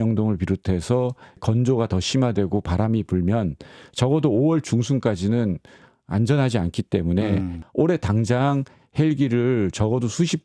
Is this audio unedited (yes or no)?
no